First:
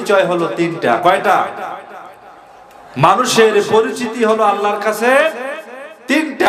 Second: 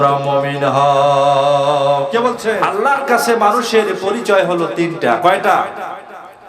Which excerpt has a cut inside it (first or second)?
second